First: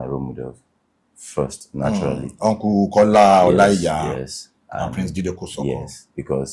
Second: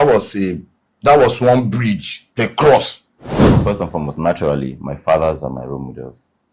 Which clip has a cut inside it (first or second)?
second